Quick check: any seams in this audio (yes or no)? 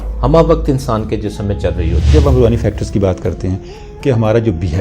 yes